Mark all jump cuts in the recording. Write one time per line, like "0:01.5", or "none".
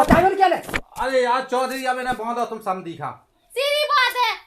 0:03.4